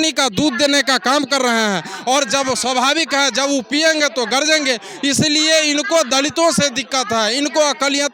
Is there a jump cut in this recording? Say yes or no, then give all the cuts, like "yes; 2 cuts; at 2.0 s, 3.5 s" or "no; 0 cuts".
no; 0 cuts